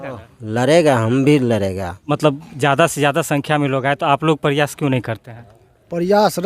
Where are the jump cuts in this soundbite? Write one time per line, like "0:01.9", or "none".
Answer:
0:02.0